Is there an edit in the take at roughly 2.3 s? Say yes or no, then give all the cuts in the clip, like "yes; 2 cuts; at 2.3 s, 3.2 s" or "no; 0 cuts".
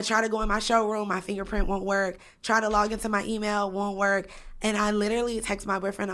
no; 0 cuts